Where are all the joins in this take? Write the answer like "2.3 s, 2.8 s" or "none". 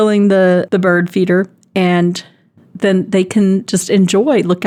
none